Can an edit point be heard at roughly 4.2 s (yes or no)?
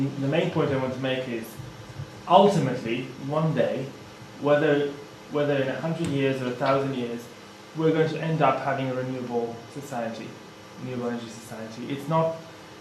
no